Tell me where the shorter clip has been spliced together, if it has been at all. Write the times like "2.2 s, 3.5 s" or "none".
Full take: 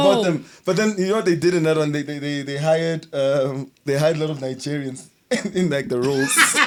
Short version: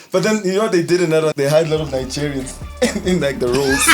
1.3 s